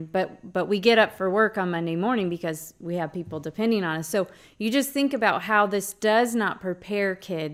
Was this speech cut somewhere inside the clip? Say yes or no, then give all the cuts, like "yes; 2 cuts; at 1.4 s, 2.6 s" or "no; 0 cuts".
no; 0 cuts